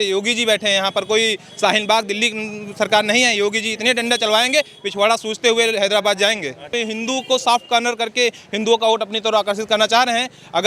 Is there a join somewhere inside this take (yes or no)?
yes